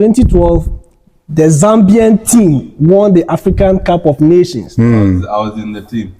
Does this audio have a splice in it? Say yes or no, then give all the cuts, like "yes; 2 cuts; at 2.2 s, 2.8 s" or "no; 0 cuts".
no; 0 cuts